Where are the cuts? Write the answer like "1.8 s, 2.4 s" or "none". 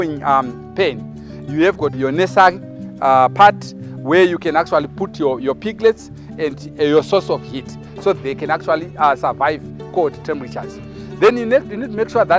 2.0 s, 8.2 s